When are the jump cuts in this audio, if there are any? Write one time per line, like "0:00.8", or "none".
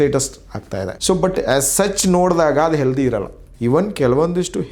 0:01.0
0:03.4